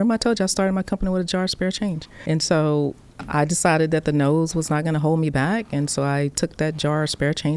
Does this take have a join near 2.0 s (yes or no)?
no